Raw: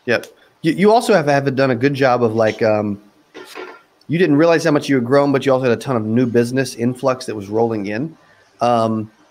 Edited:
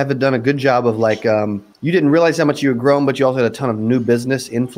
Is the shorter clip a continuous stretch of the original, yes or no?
no